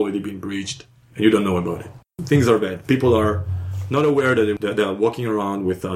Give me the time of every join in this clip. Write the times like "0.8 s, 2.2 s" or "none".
2.1 s